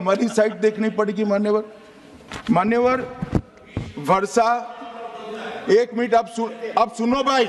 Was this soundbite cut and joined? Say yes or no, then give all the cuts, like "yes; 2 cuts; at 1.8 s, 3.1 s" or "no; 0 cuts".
no; 0 cuts